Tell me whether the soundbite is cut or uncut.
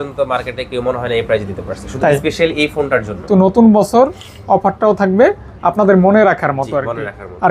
cut